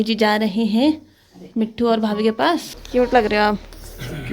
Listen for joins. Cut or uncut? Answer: cut